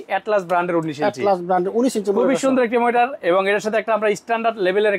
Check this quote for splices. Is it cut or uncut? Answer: uncut